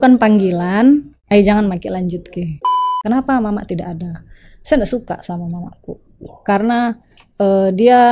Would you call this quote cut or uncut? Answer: cut